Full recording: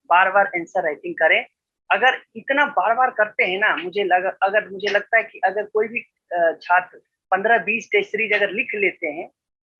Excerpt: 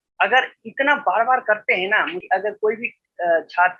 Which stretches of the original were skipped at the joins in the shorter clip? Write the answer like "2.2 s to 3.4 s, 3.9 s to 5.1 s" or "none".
3.9 s to 5.3 s